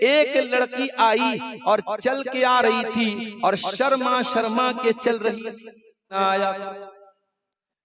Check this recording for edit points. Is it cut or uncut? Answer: cut